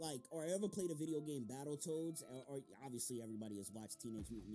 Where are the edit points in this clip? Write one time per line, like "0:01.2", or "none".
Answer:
none